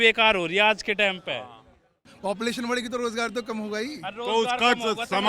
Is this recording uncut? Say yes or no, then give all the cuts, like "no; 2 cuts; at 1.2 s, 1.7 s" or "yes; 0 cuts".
no; 1 cut; at 2.0 s